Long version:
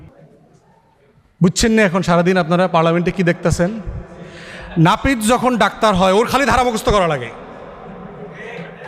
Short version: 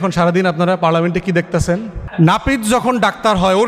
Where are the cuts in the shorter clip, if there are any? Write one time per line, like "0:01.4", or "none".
0:02.0